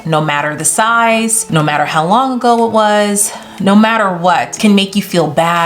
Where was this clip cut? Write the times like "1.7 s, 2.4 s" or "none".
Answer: 1.4 s, 4.6 s